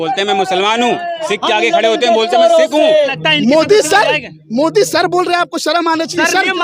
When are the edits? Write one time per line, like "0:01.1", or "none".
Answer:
0:03.2